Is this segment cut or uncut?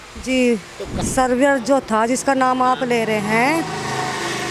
cut